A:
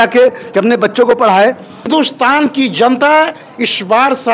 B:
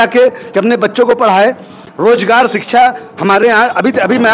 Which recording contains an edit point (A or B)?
A